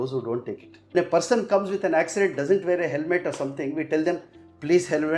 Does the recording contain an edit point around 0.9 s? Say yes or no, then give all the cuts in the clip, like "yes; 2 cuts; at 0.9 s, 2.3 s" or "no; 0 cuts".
yes; 1 cut; at 0.9 s